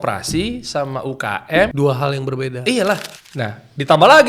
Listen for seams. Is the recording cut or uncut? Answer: cut